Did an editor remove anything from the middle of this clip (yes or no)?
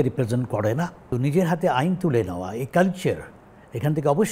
yes